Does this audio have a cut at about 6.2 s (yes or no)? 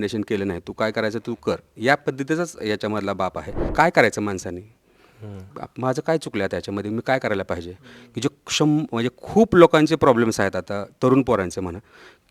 no